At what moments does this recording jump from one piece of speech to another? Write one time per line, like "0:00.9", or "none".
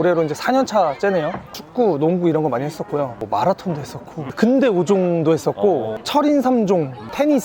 0:01.5
0:03.2